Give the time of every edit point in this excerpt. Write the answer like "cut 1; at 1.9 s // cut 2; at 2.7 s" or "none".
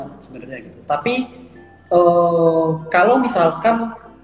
none